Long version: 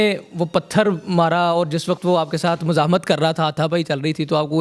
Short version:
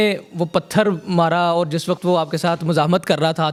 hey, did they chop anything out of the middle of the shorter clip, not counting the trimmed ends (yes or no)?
no